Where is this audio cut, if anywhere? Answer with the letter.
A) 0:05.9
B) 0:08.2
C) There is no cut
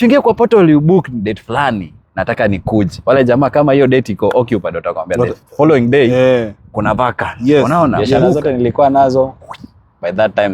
B